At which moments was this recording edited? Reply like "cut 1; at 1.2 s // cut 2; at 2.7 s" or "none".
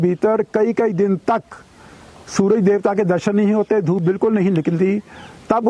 none